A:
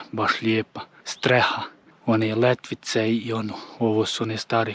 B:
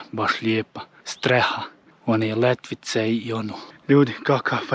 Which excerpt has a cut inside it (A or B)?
B